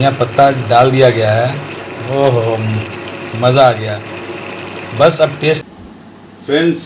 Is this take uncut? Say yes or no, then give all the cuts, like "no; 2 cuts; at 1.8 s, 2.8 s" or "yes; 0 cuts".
no; 1 cut; at 5.6 s